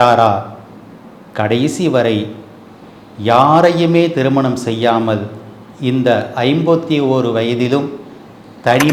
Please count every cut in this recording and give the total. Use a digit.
0